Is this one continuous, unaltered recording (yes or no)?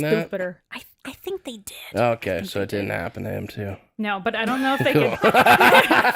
yes